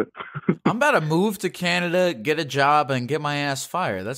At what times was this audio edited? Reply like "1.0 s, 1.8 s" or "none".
none

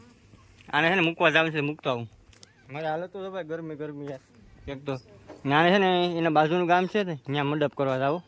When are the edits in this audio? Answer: none

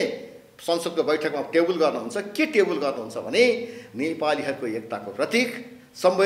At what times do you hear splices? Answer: none

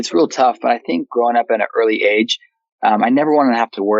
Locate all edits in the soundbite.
1.1 s

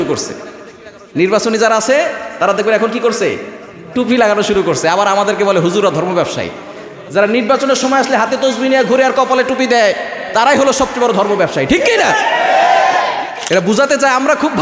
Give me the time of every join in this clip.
13.3 s

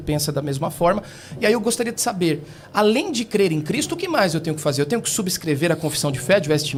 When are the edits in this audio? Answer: none

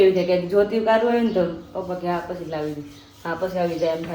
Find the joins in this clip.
none

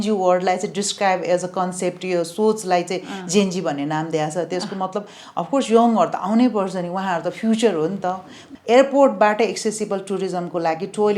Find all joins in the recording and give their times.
8.4 s

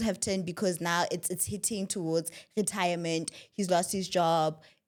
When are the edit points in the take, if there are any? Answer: none

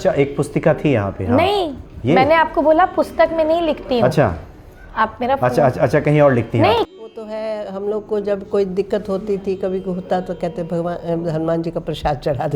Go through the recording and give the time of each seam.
6.9 s

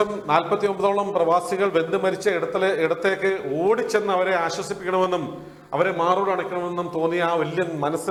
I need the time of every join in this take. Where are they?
none

